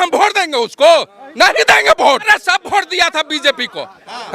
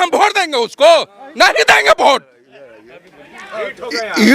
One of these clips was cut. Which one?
first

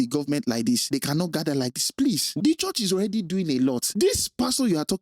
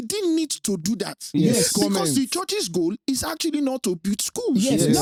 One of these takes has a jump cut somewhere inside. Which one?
first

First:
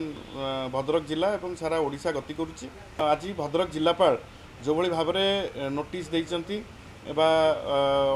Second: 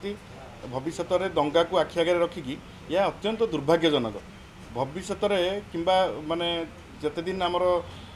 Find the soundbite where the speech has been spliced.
first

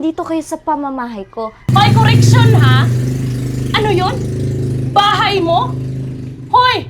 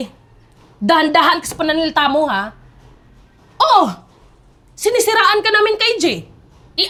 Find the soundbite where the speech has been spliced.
first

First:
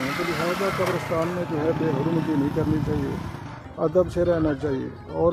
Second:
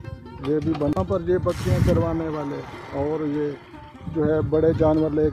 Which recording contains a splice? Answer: second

